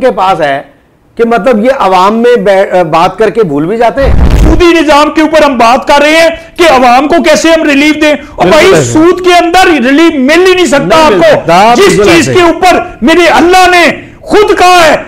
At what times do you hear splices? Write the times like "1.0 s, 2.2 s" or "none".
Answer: 4.2 s